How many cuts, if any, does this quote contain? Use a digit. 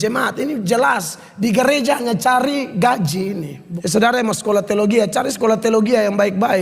1